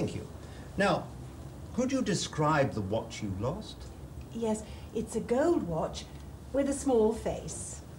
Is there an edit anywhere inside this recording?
no; 0 cuts

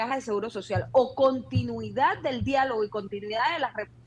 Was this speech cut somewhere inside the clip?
no; 0 cuts

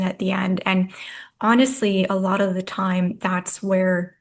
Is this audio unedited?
yes; 0 cuts

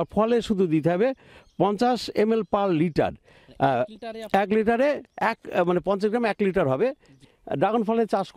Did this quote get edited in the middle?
yes; 1 cut; at 7.2 s

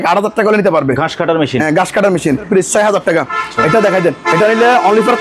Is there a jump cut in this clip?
yes; 1 cut; at 2.5 s

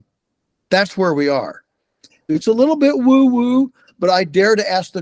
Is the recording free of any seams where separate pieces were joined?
no; 1 cut; at 2.2 s

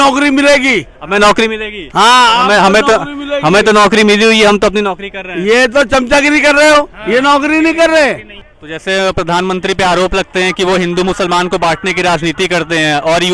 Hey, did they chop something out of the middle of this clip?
yes; 1 cut; at 8.3 s

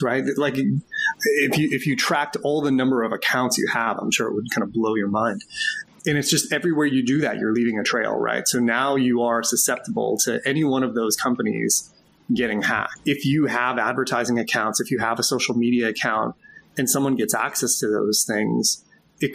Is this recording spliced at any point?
yes; 2 cuts; at 5.8 s, 12.9 s

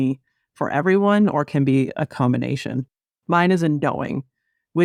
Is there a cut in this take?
no; 0 cuts

